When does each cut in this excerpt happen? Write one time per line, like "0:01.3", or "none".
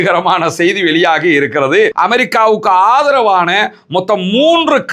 0:01.9